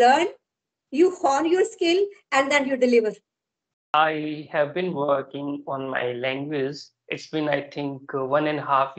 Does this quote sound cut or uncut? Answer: cut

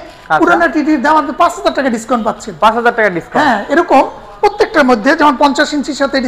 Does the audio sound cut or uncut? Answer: uncut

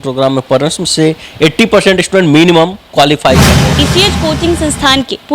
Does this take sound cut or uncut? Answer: cut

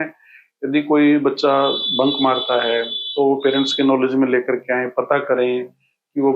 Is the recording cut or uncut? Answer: uncut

